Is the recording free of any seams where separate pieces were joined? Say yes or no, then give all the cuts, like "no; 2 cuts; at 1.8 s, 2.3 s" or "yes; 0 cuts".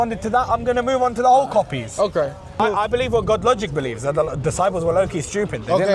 no; 1 cut; at 2.6 s